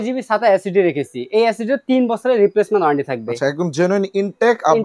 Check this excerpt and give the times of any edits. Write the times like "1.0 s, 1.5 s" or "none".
none